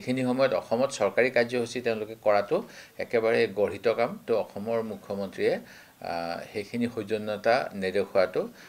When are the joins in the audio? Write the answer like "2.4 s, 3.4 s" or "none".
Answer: 4.2 s